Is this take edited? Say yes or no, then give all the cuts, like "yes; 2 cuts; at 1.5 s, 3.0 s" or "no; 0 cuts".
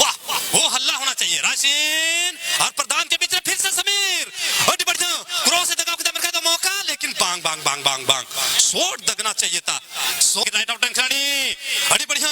yes; 1 cut; at 10.4 s